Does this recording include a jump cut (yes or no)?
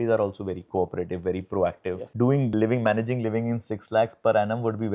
yes